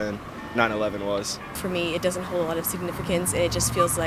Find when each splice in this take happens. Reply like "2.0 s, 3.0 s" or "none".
1.6 s

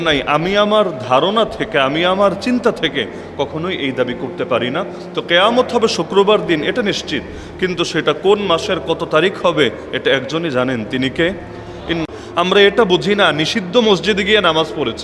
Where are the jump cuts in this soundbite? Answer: 12.0 s

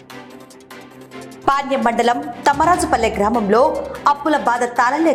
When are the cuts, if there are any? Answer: none

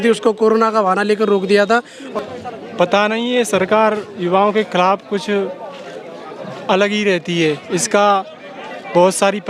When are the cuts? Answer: 2.0 s

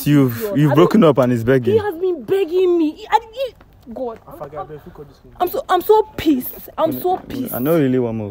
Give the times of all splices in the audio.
none

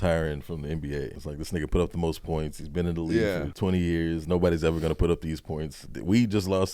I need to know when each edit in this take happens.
1.2 s, 3.5 s, 5.9 s

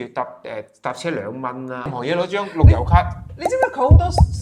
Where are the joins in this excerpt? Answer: 1.9 s

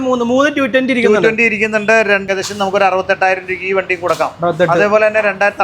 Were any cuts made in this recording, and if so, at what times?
2.3 s

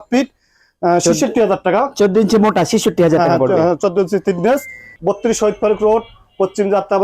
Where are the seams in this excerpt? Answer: 4.9 s

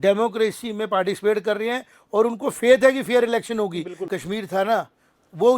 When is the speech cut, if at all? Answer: 4.0 s

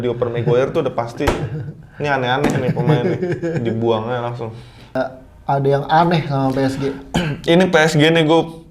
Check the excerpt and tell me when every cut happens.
4.9 s

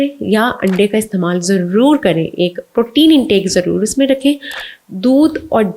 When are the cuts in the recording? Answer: none

